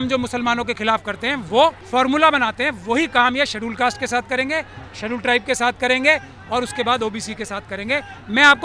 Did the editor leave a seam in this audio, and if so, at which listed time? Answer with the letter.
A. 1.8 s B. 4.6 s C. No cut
A